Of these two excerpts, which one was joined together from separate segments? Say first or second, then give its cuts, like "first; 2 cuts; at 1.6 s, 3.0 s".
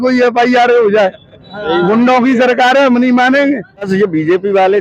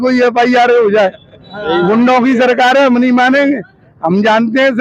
first; 1 cut; at 3.9 s